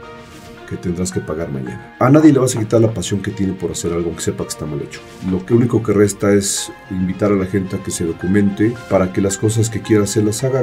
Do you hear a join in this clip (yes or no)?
yes